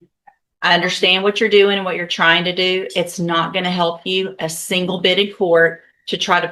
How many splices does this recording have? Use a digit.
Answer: 0